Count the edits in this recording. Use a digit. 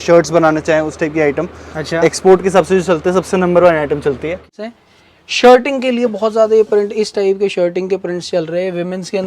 1